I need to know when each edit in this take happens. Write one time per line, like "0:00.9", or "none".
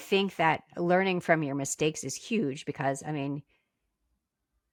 none

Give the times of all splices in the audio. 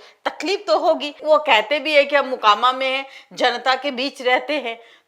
0:01.2

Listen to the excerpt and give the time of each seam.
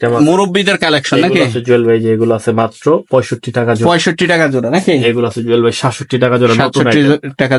none

